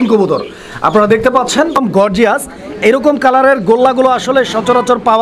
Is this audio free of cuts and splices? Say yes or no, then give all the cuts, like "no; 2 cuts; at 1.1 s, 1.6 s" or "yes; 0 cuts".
no; 1 cut; at 1.8 s